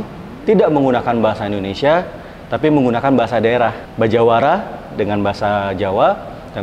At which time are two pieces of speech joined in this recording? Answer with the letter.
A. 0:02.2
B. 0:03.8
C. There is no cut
B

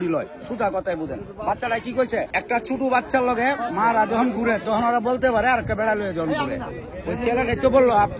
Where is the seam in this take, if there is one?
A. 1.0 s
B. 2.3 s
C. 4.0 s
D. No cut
B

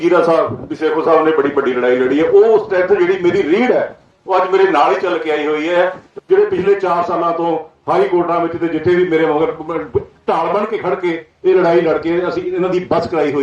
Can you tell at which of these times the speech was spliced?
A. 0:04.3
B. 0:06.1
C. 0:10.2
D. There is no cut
B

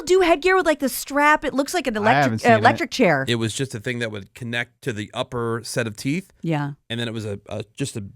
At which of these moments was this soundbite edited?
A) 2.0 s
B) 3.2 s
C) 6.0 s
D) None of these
B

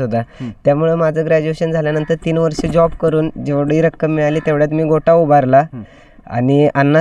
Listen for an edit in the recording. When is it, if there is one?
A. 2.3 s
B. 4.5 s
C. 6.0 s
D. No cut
D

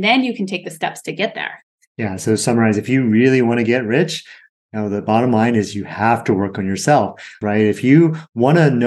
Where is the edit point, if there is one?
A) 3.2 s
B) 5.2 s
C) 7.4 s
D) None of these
C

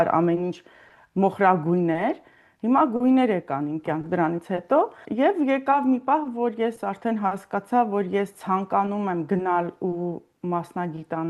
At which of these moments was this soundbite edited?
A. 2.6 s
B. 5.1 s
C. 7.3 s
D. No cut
B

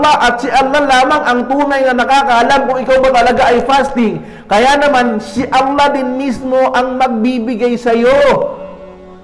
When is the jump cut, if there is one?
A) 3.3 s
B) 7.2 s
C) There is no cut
C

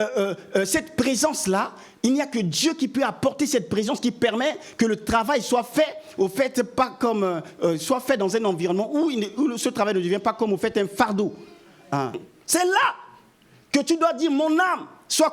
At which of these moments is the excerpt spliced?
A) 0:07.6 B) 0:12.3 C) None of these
B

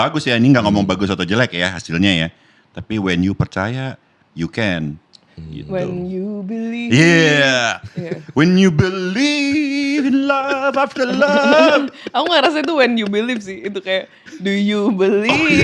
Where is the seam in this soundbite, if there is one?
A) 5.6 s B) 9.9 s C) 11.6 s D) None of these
D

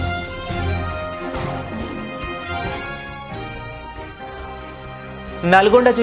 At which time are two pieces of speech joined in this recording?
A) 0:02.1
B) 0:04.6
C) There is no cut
B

